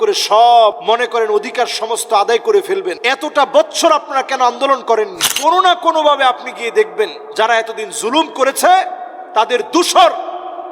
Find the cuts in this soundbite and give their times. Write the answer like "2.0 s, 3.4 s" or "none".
0.8 s, 3.0 s, 5.2 s, 7.2 s